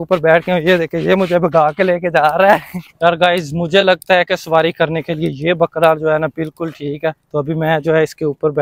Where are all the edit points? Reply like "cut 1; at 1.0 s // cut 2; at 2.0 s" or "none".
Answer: cut 1; at 2.8 s